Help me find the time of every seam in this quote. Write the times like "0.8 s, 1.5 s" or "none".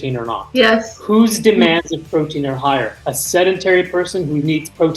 0.9 s